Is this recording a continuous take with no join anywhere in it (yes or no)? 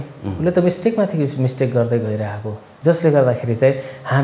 no